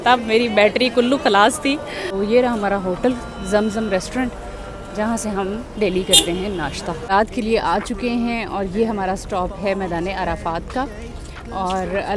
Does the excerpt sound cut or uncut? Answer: cut